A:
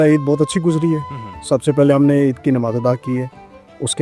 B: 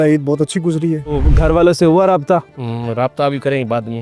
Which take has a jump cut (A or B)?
B